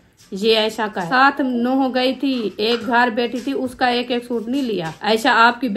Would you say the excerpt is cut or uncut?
cut